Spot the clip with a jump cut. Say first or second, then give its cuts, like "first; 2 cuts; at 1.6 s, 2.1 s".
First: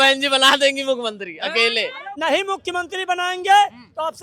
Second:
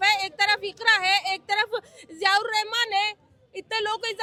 first; 1 cut; at 2.0 s